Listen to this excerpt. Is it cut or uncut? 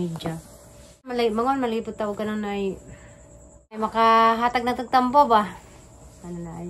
cut